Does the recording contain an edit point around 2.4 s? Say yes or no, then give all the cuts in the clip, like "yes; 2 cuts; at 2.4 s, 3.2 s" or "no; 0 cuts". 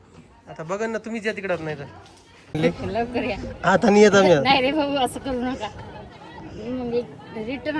yes; 1 cut; at 2.4 s